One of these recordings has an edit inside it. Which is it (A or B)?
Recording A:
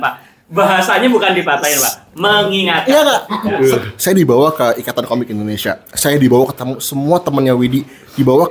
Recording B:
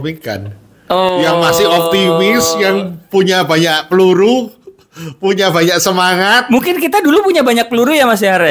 A